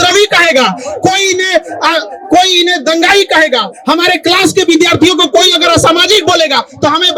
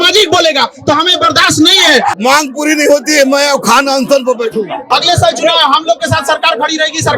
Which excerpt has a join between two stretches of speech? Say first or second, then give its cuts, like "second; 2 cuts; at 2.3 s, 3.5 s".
second; 2 cuts; at 2.2 s, 4.8 s